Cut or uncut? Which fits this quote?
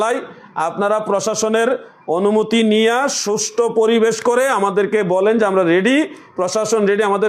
uncut